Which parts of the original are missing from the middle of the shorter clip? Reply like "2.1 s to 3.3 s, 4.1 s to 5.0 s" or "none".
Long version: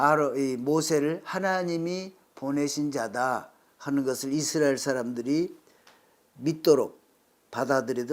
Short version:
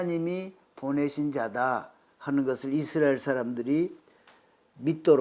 none